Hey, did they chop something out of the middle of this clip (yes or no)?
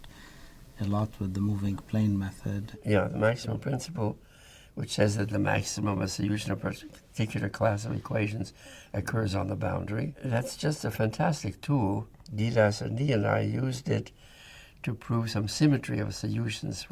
yes